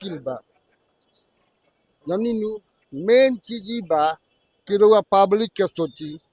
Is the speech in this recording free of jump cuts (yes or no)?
yes